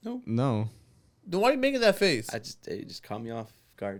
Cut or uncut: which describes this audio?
uncut